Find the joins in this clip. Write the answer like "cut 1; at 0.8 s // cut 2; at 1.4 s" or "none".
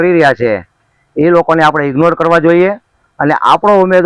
none